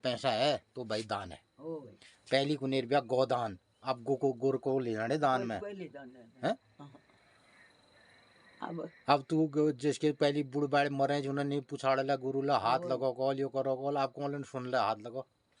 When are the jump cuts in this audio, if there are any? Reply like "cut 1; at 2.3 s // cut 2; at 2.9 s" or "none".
none